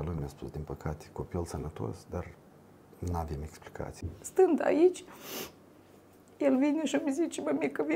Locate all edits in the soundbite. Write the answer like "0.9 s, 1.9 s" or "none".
4.0 s